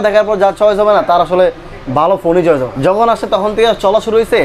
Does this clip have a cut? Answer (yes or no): yes